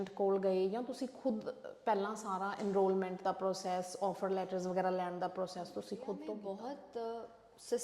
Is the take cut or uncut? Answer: cut